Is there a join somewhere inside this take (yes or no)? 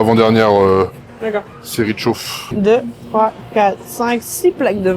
yes